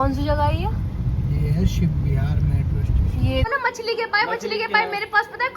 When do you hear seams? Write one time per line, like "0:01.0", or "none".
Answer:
0:03.5